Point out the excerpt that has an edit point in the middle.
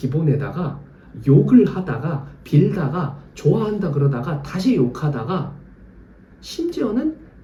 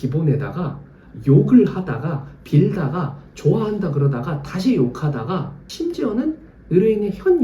second; 1 cut; at 5.6 s

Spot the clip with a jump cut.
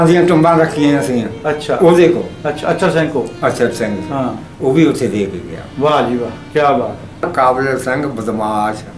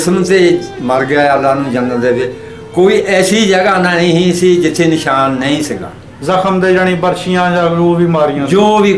first; 1 cut; at 7.3 s

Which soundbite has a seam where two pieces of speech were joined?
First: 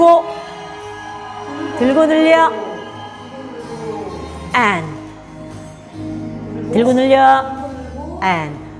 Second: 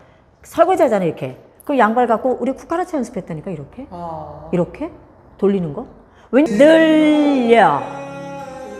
second; 1 cut; at 6.5 s

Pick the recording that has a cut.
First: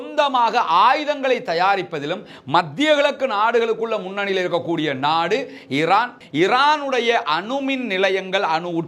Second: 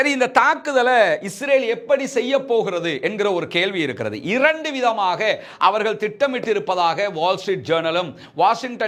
first; 1 cut; at 6.2 s

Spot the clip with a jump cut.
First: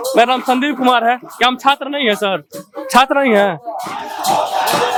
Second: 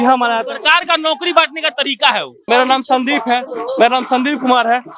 second; 1 cut; at 2.3 s

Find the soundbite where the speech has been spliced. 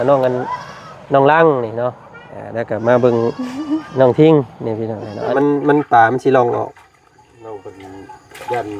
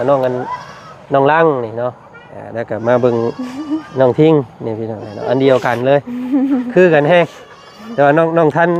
first; 1 cut; at 5.3 s

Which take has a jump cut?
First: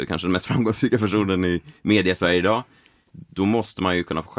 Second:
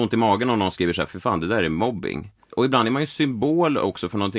second; 2 cuts; at 1.1 s, 2.4 s

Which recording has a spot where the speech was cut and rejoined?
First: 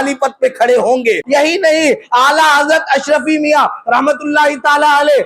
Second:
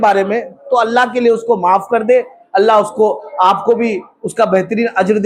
first; 1 cut; at 1.2 s

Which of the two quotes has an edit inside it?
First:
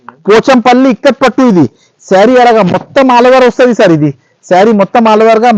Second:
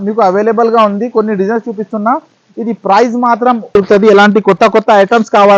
second; 1 cut; at 3.7 s

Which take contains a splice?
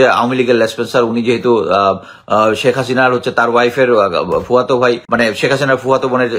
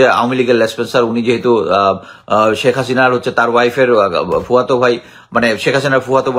first; 1 cut; at 5.0 s

